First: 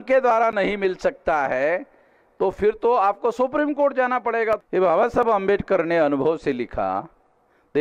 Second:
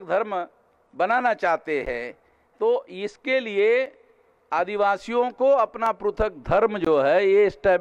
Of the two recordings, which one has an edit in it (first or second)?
first